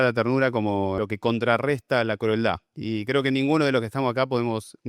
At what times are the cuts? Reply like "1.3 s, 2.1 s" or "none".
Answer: 1.0 s